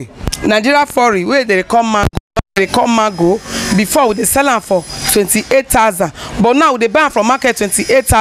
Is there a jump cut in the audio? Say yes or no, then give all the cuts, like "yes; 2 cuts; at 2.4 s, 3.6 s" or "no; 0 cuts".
no; 0 cuts